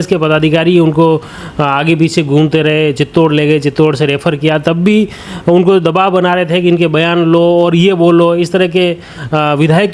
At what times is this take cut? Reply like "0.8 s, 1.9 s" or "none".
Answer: none